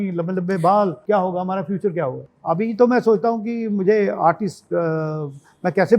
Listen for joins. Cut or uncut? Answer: cut